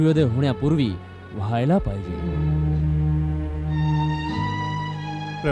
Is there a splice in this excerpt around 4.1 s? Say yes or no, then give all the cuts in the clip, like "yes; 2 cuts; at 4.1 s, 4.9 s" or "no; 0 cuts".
no; 1 cut; at 2.3 s